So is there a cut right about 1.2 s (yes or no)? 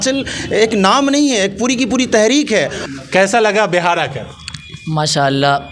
no